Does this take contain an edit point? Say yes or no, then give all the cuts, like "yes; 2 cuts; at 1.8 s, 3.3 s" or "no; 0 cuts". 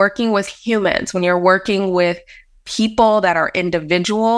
no; 0 cuts